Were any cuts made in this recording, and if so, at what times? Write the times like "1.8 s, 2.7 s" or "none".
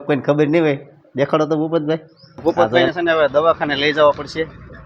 2.4 s